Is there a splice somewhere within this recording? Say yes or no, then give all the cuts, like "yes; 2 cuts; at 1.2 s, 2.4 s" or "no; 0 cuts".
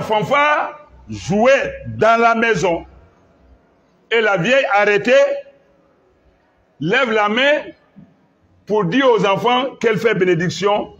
no; 0 cuts